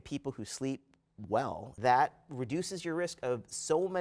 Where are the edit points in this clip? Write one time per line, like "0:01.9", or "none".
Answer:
0:01.7